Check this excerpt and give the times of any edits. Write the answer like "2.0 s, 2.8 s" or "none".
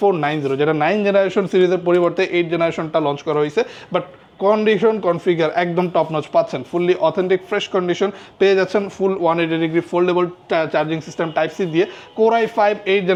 none